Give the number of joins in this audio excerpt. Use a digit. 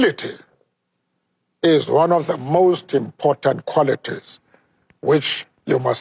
0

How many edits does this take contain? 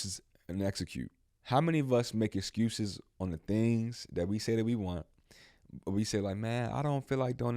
1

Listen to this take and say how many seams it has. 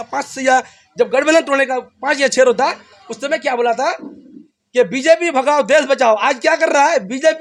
0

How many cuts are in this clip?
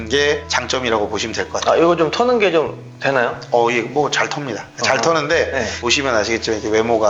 1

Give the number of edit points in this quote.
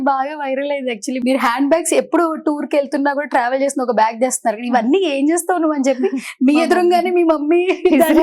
1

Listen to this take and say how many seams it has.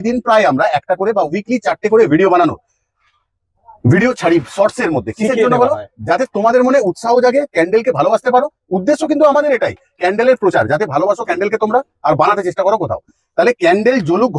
0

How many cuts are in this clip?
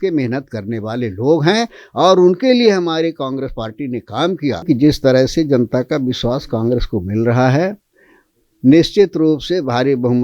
1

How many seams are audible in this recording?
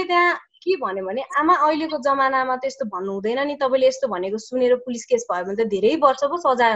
0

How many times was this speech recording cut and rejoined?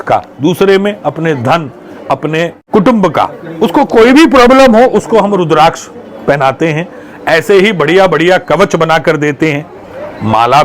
0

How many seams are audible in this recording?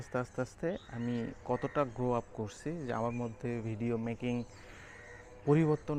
0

